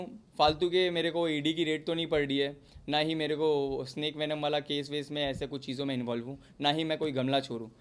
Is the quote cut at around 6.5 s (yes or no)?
no